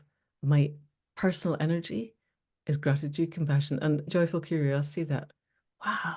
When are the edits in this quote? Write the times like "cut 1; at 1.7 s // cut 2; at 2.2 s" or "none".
cut 1; at 4.1 s